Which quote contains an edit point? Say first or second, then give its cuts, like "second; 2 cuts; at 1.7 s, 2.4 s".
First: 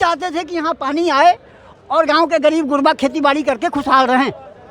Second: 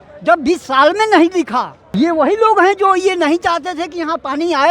second; 1 cut; at 1.8 s